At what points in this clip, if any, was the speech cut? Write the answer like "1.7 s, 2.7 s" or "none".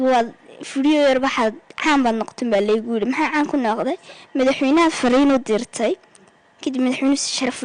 none